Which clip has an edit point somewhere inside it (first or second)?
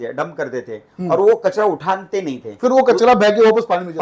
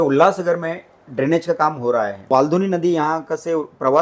second